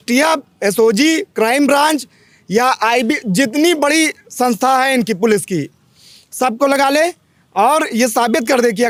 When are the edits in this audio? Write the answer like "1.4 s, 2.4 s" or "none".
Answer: none